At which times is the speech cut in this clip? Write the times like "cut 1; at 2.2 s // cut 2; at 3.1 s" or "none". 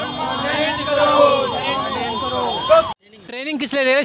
cut 1; at 2.9 s